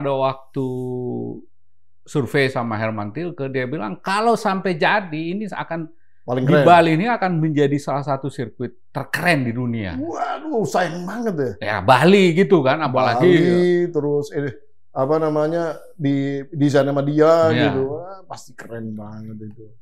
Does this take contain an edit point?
no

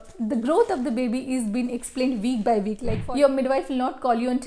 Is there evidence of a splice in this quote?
yes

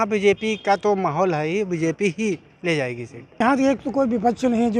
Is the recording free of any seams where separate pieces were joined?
no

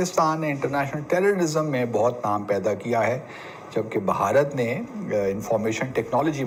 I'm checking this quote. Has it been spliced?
no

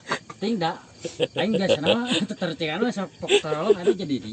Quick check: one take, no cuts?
yes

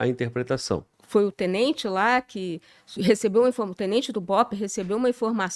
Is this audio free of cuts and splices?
no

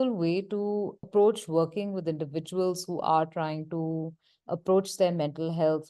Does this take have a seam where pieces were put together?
yes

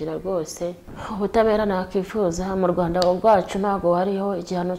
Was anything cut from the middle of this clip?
yes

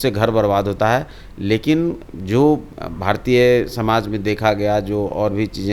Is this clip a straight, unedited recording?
yes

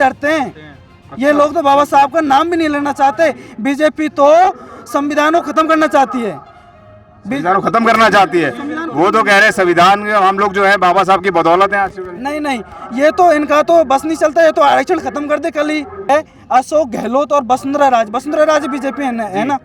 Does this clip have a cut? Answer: yes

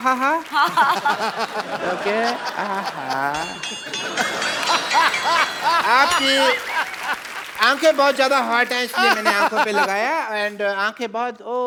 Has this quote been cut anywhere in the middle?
no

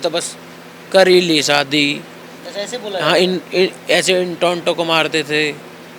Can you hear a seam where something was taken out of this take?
no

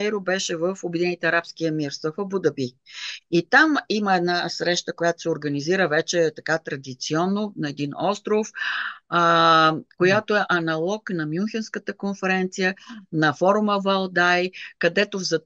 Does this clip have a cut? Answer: no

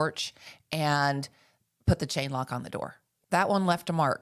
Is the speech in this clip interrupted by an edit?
yes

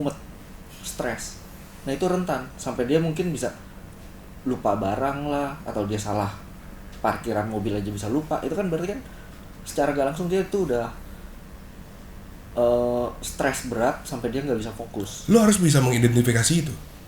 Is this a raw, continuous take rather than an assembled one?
yes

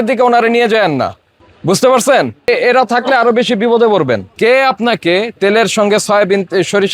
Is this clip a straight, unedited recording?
no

